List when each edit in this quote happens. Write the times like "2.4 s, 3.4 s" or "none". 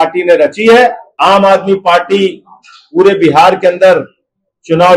1.1 s